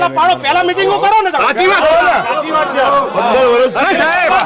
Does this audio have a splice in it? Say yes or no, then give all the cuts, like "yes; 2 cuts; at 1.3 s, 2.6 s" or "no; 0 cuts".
no; 0 cuts